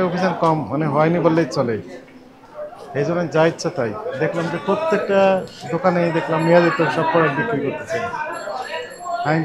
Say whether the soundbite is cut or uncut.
uncut